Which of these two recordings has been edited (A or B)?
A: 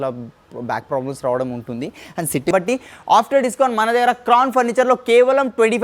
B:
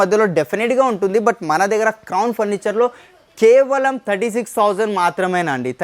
A